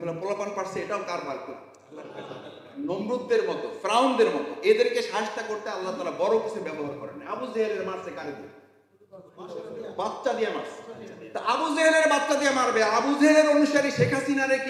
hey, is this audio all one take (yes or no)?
yes